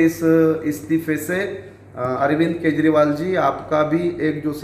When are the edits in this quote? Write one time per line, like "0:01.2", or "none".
none